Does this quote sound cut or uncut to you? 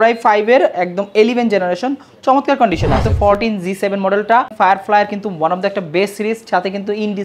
cut